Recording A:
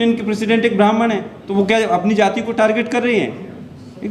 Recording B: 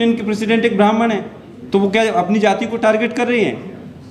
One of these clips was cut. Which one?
A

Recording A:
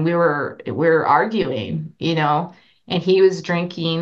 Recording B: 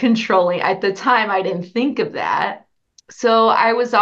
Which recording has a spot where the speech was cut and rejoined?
B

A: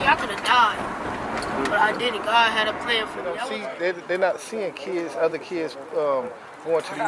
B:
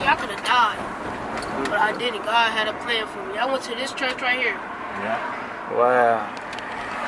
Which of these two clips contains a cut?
A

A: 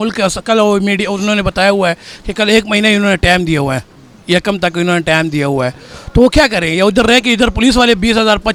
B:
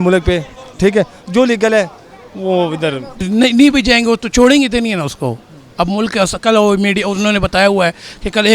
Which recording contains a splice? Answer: B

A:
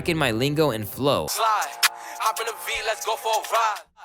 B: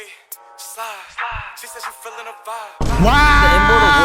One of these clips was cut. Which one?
A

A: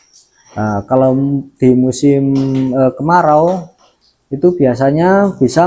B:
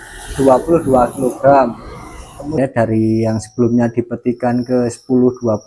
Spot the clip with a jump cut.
B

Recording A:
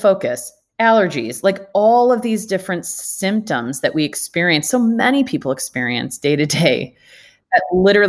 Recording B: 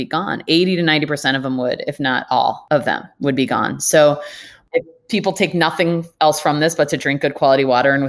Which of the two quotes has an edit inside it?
B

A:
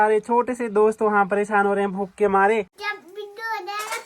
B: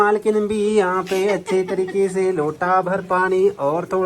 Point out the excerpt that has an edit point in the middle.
A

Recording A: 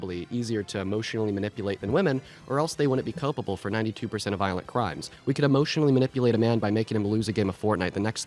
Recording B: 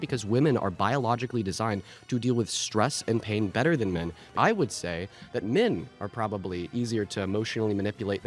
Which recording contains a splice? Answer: B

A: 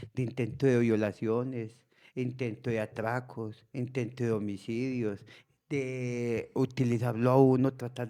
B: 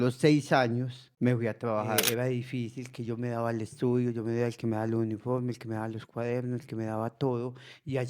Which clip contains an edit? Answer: B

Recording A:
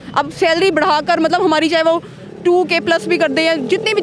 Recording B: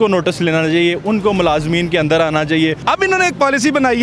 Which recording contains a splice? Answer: B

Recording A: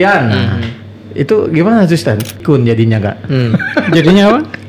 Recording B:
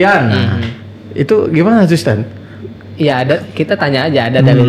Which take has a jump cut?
A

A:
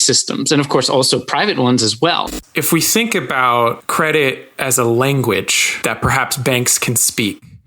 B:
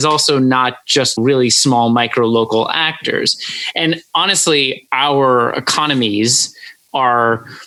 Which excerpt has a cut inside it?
A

